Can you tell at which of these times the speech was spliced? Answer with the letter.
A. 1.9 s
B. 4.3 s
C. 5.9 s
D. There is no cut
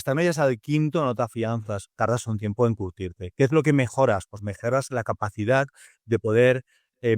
A